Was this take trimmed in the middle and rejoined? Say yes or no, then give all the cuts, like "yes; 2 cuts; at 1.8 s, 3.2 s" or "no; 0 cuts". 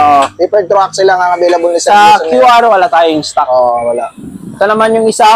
no; 0 cuts